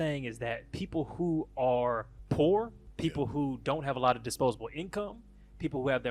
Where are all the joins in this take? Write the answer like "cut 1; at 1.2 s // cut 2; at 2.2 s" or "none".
cut 1; at 2.1 s // cut 2; at 2.8 s